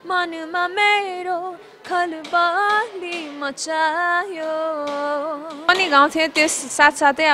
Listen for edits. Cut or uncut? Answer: cut